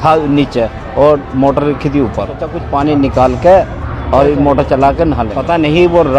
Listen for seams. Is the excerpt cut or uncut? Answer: cut